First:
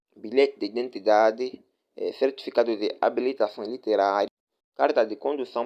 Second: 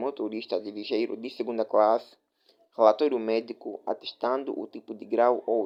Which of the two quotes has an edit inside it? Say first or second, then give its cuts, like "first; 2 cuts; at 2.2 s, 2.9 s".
first; 1 cut; at 4.3 s